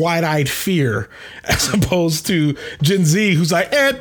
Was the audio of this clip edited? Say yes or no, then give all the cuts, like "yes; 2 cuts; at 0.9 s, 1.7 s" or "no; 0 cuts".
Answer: no; 0 cuts